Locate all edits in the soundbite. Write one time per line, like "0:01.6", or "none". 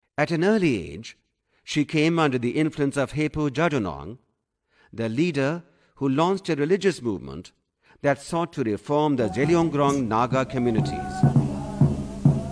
0:11.3

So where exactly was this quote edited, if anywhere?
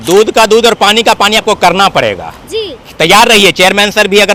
none

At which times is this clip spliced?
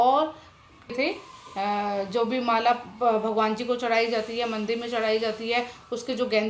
0:00.9

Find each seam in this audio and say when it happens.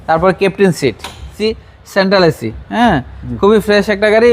0:01.4

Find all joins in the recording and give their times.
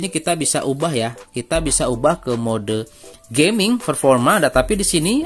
none

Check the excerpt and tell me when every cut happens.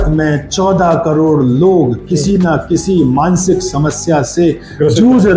none

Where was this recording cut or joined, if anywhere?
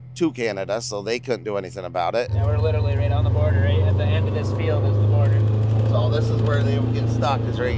0:02.3

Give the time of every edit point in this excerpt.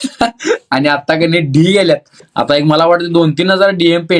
0:02.2

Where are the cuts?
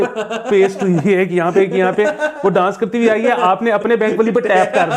none

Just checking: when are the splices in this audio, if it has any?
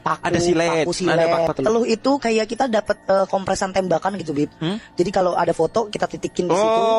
0:01.5

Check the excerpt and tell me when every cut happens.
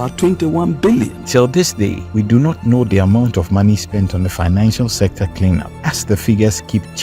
0:01.2
0:02.0
0:05.7

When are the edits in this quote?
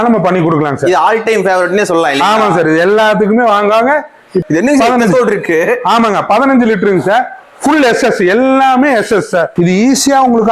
0:04.4
0:09.5

